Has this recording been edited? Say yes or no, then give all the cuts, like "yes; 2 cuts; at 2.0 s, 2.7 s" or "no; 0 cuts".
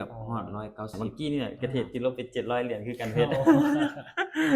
yes; 1 cut; at 0.9 s